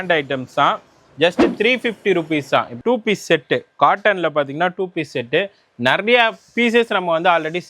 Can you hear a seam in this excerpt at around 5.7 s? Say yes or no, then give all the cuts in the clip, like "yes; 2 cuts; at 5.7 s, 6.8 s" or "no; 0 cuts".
no; 1 cut; at 2.8 s